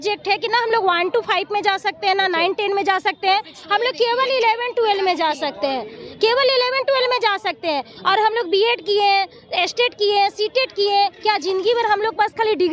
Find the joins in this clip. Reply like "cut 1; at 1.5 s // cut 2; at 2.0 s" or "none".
none